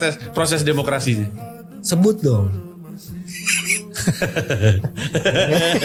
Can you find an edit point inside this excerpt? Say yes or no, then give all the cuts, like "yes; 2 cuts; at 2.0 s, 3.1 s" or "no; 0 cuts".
no; 0 cuts